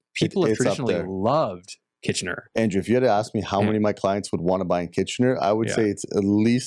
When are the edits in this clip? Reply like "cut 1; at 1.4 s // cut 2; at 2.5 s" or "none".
none